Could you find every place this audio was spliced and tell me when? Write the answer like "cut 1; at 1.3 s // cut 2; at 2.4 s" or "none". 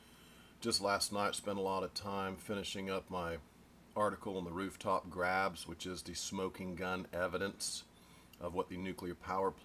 cut 1; at 5.1 s

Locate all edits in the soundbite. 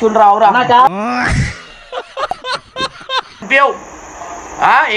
cut 1; at 0.9 s // cut 2; at 3.4 s

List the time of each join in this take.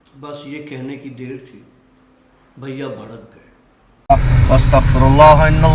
cut 1; at 3.9 s

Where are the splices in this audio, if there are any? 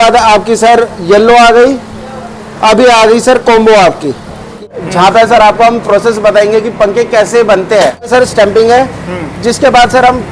cut 1; at 4.7 s // cut 2; at 8.1 s

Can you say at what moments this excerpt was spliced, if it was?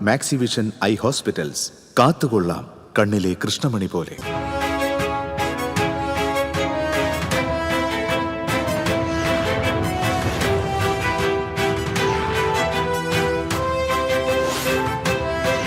cut 1; at 4.1 s

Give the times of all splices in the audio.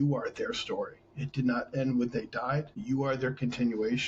cut 1; at 2.7 s

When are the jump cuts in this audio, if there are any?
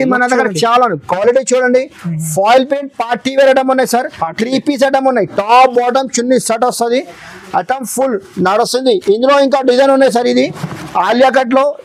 none

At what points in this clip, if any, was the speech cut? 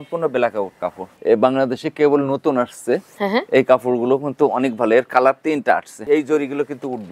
cut 1; at 1.2 s // cut 2; at 6.0 s

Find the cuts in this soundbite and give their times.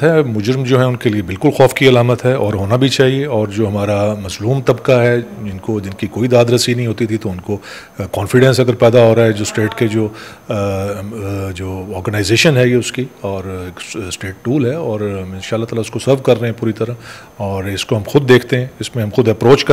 none

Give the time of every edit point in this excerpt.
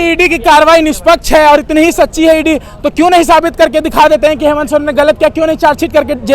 none

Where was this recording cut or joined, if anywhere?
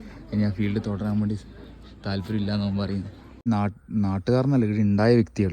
cut 1; at 3.5 s

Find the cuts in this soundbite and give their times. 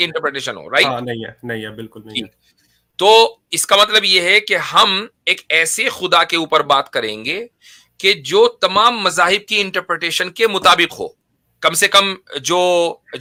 none

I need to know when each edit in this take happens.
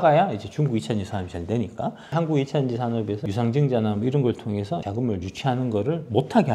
cut 1; at 2.1 s // cut 2; at 3.2 s // cut 3; at 4.9 s

